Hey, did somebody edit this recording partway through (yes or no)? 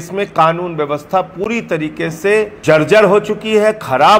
yes